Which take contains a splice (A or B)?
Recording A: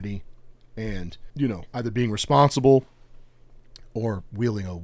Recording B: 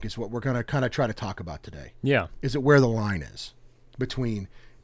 A